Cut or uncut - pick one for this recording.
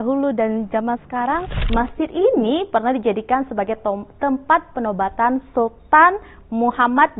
cut